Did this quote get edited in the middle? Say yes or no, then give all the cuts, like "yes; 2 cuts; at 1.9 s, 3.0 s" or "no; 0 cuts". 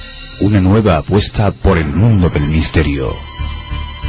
yes; 1 cut; at 2.4 s